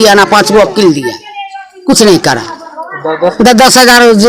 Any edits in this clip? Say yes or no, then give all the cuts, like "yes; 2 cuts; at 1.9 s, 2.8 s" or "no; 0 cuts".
no; 0 cuts